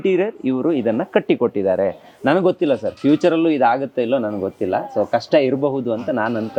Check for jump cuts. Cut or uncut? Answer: uncut